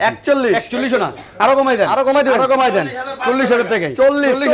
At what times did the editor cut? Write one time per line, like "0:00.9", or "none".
none